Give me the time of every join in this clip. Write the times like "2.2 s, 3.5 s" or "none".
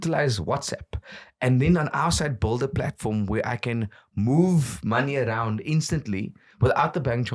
none